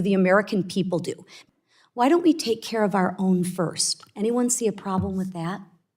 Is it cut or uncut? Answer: cut